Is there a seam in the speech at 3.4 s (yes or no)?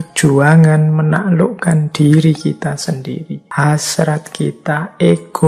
yes